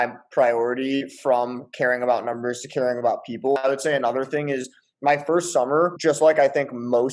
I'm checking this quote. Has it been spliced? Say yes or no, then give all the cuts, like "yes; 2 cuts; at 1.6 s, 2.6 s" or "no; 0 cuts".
no; 0 cuts